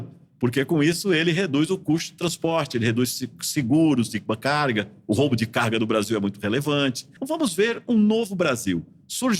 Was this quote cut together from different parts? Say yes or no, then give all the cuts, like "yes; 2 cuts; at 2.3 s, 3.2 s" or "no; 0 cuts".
yes; 1 cut; at 7.1 s